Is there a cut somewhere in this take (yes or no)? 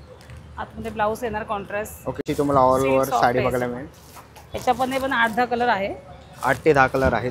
yes